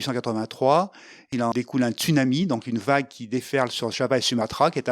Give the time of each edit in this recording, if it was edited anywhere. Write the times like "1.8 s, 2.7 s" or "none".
1.3 s